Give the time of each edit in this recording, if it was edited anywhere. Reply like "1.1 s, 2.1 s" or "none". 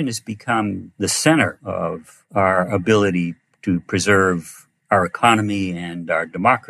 0.9 s, 1.9 s